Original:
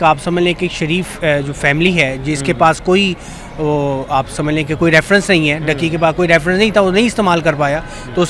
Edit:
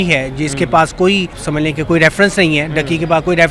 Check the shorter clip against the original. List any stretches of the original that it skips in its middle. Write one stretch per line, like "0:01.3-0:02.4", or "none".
0:03.3-0:04.3